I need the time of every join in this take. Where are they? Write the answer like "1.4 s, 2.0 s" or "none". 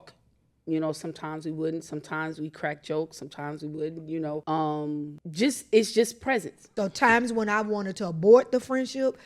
4.4 s, 5.2 s, 6.6 s